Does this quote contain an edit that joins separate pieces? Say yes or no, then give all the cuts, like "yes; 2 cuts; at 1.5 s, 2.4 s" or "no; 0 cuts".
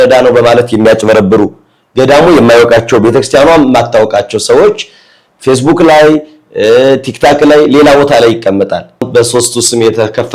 yes; 1 cut; at 9.1 s